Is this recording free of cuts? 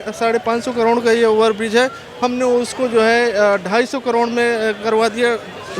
yes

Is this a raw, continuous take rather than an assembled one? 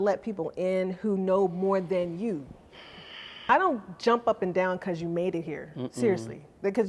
no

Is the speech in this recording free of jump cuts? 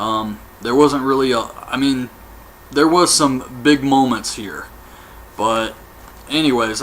no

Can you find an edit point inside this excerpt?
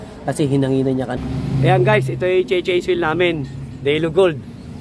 yes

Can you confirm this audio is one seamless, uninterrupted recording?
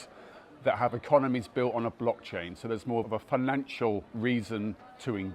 no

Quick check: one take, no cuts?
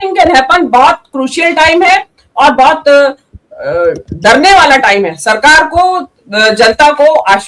yes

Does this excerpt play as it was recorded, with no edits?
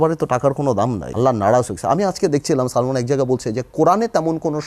no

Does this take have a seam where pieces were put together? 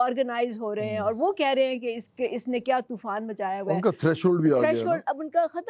no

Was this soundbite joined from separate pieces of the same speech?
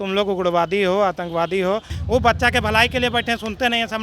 yes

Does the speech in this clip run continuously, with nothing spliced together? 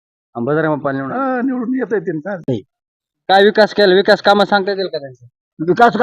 no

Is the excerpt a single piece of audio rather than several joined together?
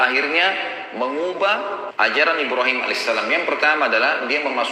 no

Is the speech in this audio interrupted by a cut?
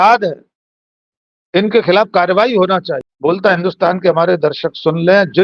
yes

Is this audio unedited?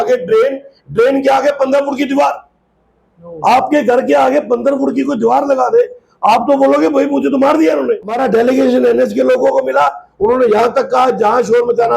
no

